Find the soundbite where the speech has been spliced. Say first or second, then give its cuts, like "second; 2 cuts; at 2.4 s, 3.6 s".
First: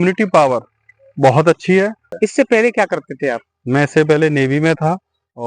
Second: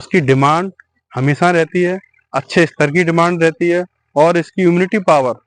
first; 1 cut; at 2.0 s